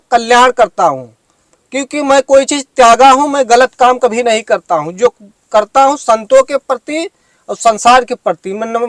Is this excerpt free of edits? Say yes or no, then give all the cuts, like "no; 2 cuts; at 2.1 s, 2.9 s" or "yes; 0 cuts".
yes; 0 cuts